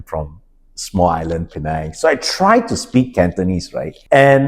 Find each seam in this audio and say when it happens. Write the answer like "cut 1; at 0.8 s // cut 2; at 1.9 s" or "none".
none